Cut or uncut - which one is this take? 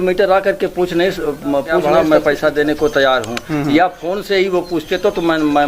cut